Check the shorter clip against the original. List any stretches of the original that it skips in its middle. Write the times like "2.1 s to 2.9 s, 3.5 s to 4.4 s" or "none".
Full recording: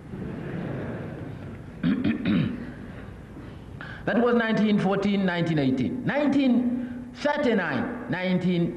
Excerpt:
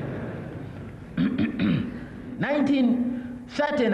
3.0 s to 6.0 s